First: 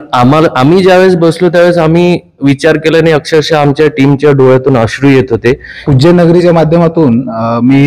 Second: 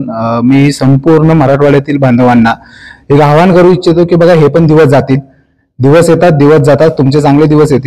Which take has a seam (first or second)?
first